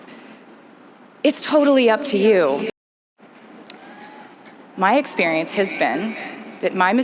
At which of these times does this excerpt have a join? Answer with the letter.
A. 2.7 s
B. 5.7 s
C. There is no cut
A